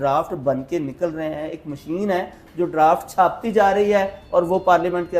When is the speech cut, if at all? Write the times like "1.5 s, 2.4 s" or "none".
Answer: none